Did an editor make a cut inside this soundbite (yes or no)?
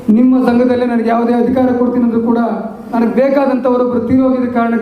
yes